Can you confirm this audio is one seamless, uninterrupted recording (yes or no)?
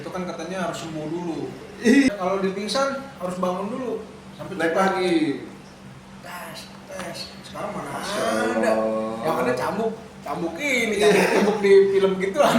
no